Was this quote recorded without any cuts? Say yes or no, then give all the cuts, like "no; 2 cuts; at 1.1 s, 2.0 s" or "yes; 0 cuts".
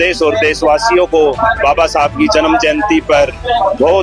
yes; 0 cuts